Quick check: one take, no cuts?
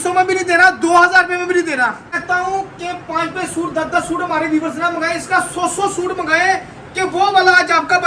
no; 1 cut; at 2.1 s

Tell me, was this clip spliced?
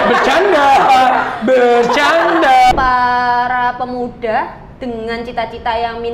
yes; 1 cut; at 2.7 s

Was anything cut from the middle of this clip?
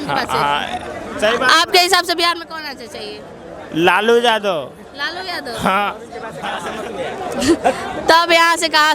no; 0 cuts

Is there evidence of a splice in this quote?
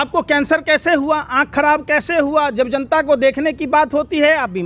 no; 0 cuts

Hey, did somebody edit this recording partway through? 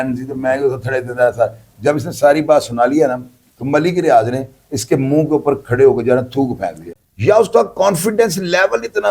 yes; 1 cut; at 6.9 s

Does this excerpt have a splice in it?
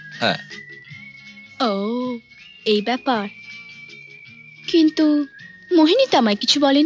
no; 0 cuts

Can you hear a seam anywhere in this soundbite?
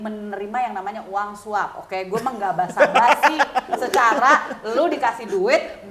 no; 0 cuts

